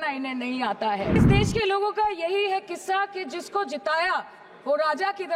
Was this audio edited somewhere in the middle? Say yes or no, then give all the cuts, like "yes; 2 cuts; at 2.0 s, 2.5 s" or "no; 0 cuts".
yes; 1 cut; at 1.2 s